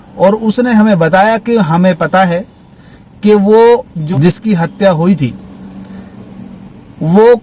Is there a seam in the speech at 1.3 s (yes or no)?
no